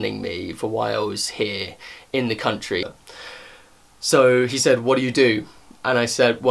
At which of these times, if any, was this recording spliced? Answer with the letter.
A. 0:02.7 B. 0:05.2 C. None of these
A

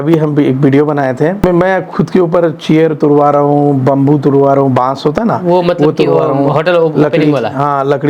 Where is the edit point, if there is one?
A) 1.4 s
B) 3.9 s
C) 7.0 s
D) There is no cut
A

